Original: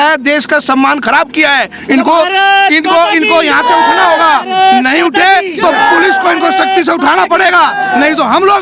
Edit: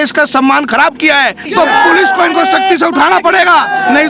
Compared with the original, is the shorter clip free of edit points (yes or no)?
no